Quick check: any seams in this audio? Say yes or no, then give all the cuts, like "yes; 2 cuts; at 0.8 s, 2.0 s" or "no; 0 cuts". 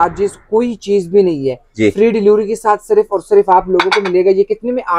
no; 0 cuts